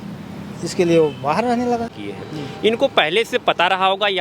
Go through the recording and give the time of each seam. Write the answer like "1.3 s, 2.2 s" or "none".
1.9 s

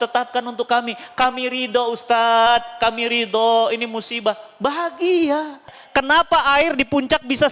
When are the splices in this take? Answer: 5.8 s

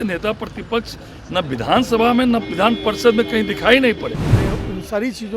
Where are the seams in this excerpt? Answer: 4.2 s

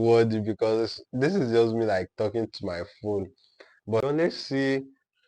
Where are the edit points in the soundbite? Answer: 4.0 s

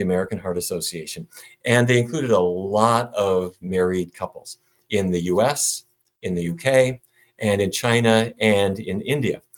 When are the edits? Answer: none

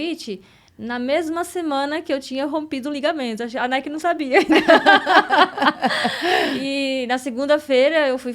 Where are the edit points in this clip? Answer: none

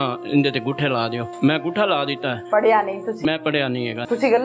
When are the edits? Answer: 1.2 s, 2.3 s, 3.5 s

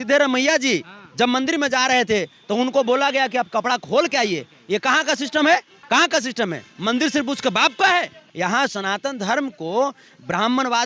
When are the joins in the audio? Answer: 5.7 s, 8.2 s

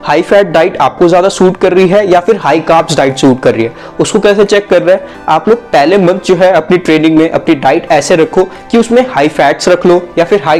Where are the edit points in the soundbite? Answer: none

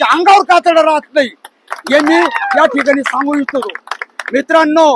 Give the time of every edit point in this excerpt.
none

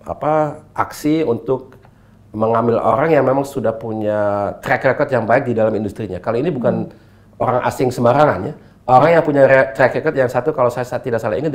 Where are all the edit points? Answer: none

